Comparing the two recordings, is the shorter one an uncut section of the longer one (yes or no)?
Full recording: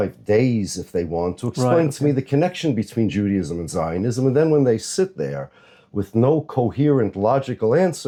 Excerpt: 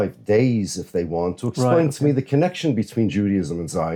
yes